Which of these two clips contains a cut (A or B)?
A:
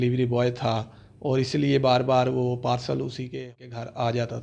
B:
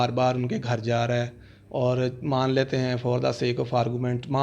A